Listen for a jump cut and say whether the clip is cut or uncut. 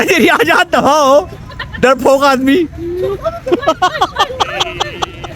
cut